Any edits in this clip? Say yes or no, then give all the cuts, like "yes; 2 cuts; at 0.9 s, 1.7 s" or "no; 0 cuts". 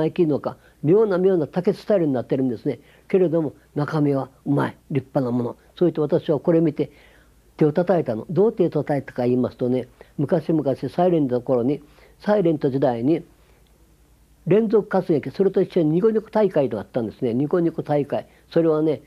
yes; 1 cut; at 11.3 s